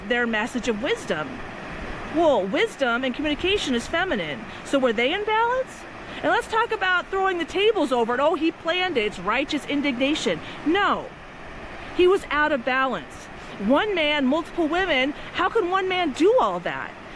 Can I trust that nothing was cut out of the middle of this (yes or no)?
yes